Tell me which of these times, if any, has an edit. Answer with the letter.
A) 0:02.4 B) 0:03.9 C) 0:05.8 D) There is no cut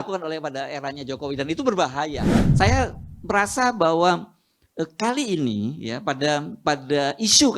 A